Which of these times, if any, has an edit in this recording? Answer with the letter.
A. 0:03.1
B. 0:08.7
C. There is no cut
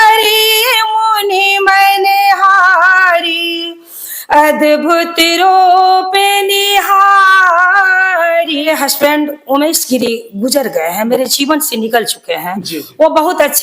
B